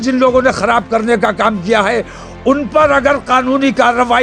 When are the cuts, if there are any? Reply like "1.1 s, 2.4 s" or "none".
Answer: none

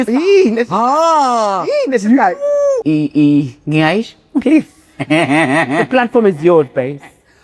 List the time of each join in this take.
2.8 s

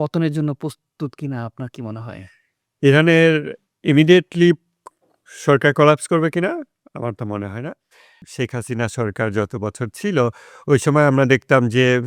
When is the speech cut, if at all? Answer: 8.2 s

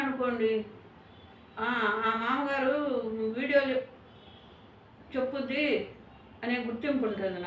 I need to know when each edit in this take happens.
none

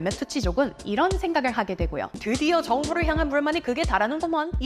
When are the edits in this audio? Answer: 2.2 s

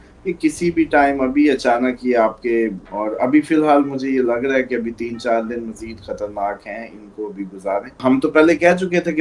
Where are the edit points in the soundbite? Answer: 2.8 s, 8.0 s

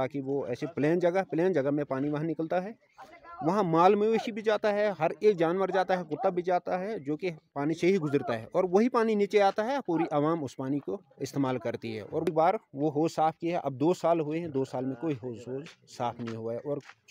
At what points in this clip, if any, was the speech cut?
12.3 s

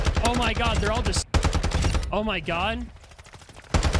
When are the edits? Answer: 1.2 s

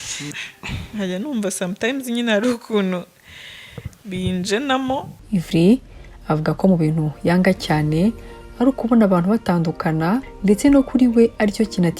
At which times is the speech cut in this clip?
5.2 s

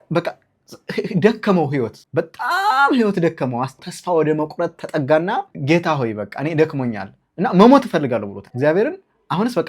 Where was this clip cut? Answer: 2.0 s, 3.8 s, 5.5 s, 8.4 s

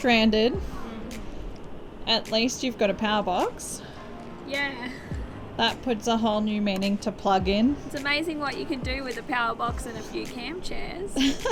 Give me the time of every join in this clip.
none

